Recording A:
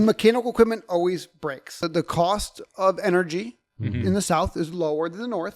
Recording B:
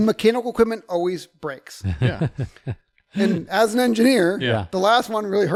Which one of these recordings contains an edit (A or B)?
A